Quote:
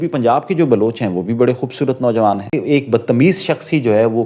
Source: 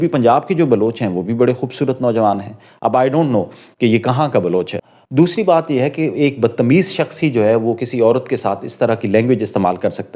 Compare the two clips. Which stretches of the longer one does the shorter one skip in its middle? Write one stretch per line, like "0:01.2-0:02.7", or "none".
0:02.5-0:06.0